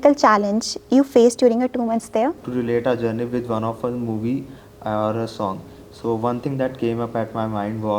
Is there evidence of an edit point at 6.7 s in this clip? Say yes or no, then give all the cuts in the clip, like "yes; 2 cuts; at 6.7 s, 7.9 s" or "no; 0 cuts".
no; 1 cut; at 2.4 s